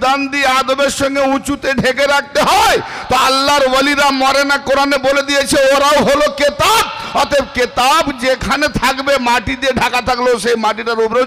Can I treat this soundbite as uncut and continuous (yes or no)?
yes